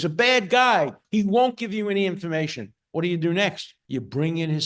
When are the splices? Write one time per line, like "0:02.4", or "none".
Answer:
0:01.0
0:03.7